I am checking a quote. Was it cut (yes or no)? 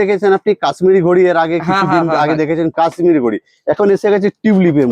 no